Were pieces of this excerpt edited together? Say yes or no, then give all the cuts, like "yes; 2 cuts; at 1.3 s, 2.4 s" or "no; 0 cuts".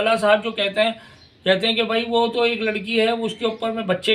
no; 0 cuts